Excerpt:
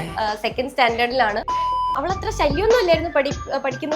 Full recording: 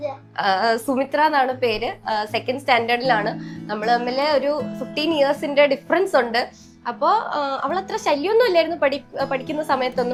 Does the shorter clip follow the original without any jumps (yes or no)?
no